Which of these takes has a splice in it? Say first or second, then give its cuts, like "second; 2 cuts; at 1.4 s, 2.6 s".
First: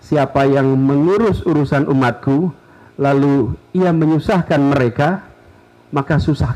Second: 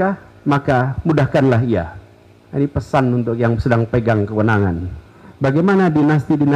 second; 1 cut; at 4.9 s